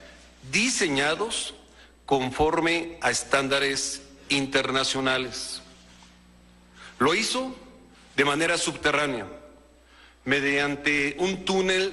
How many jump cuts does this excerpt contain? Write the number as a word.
one